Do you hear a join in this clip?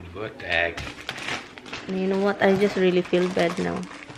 no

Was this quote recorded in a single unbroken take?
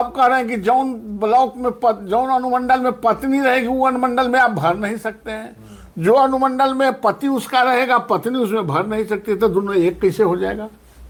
yes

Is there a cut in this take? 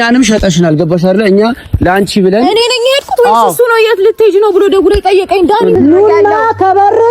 yes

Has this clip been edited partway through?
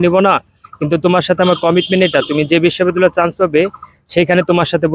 no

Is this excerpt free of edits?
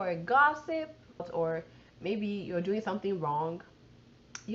no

